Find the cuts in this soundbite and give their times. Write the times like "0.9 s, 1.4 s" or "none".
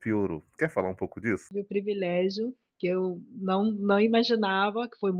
1.5 s